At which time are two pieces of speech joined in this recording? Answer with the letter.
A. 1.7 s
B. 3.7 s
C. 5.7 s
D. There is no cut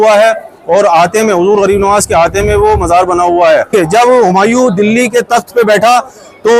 B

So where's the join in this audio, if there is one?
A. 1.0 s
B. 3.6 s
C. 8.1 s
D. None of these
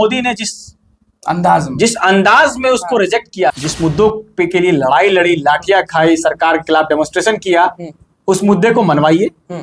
B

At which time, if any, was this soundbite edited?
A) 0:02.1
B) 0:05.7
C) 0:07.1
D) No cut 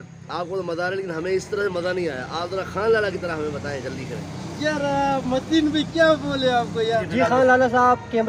C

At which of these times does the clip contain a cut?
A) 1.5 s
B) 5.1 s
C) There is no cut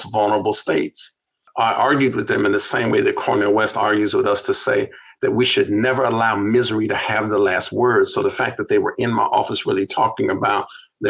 A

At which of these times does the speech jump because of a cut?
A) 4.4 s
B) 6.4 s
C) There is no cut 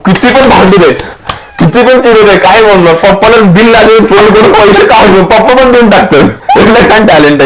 B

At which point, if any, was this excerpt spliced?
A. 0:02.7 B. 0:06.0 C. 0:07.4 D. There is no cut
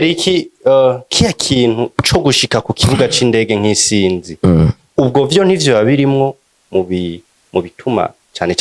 D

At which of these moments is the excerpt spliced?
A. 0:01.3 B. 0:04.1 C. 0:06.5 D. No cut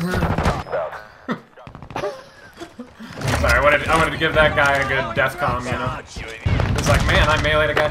C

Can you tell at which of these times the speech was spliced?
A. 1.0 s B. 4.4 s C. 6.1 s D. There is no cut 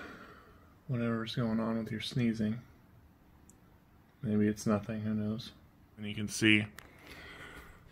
C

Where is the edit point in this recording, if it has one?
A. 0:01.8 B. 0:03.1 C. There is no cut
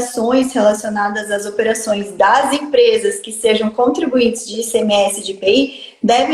C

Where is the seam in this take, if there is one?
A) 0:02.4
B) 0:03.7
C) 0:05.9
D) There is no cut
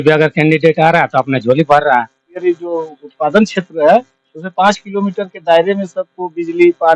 A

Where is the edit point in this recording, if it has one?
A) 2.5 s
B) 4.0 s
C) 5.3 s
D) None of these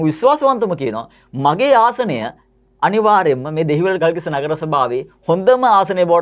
B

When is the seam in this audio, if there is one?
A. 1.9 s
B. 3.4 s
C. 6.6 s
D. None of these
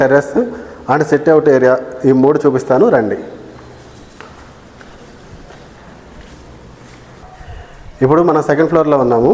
D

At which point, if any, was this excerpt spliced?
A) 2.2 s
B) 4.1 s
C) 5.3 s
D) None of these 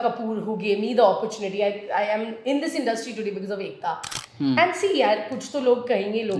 B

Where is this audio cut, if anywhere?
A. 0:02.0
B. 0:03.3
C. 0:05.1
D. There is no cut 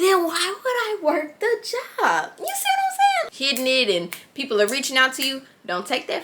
B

